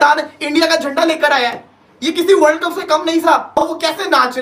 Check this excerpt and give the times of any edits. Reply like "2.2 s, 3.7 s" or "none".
3.5 s